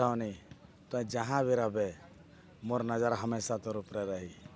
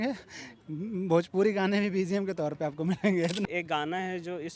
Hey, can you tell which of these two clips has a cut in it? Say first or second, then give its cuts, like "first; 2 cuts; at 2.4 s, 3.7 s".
second; 1 cut; at 3.5 s